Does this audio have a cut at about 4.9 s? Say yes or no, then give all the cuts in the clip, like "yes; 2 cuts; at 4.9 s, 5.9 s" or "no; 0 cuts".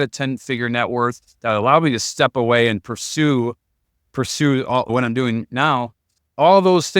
yes; 1 cut; at 4.9 s